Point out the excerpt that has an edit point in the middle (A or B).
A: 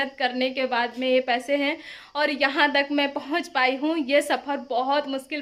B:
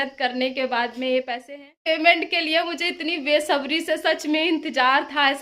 B